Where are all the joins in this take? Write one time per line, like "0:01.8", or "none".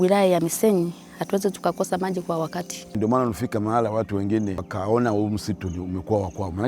0:02.8
0:04.7